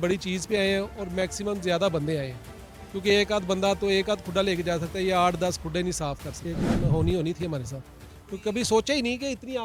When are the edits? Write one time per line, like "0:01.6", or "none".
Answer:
0:06.7